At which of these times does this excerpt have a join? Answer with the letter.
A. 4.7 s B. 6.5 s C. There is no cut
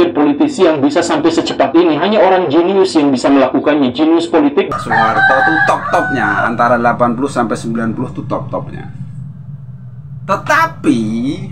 A